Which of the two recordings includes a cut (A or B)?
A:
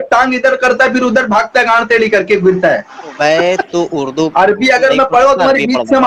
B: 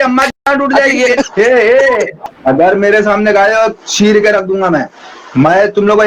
B